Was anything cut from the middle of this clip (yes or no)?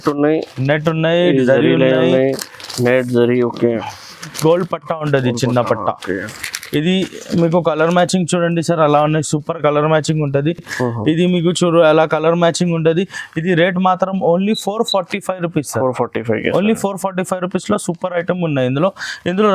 no